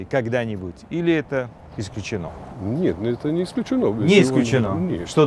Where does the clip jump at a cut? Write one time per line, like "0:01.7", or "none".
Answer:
none